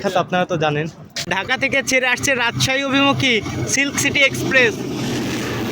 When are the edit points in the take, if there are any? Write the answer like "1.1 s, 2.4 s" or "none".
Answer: 1.3 s

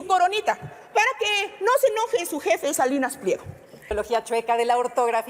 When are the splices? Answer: 3.9 s

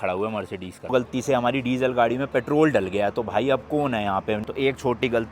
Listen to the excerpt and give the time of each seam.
0.9 s, 4.4 s

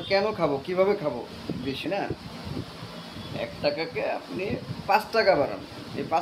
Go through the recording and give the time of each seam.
1.8 s

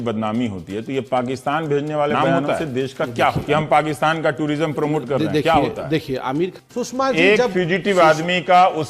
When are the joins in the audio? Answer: 3.4 s, 6.7 s

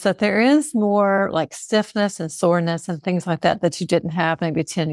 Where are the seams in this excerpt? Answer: none

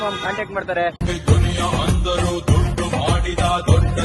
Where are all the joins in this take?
1.1 s

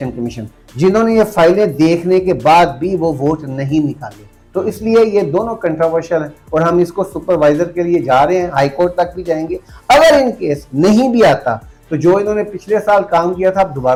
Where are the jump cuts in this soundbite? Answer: none

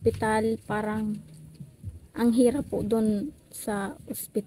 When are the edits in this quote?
none

